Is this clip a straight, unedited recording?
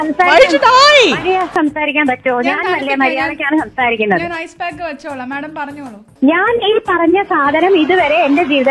no; 2 cuts; at 1.5 s, 6.0 s

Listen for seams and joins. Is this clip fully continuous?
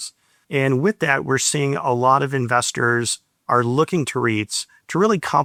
yes; 0 cuts

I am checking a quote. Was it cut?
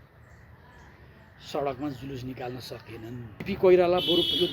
yes; 1 cut; at 3.4 s

